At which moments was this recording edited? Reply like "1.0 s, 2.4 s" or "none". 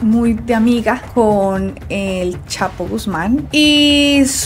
none